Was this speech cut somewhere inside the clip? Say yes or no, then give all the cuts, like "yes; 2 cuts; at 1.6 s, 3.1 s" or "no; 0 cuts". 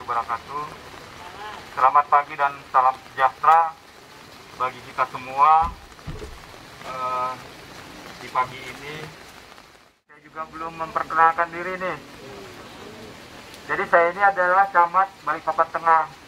yes; 1 cut; at 10.3 s